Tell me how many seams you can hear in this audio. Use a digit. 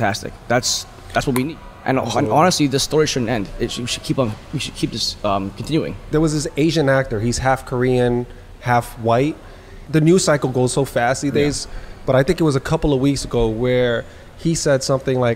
1